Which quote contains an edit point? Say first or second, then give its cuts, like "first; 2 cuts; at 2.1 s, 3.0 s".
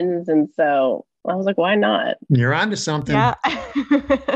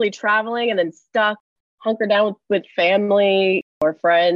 first; 2 cuts; at 2.2 s, 3.2 s